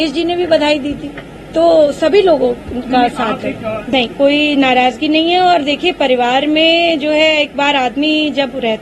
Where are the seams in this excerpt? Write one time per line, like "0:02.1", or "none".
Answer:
0:03.9